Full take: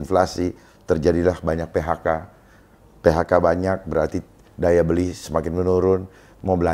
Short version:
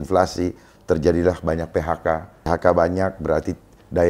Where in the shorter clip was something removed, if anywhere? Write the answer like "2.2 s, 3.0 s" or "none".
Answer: 2.5 s